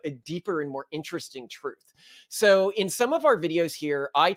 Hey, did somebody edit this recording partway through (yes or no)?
no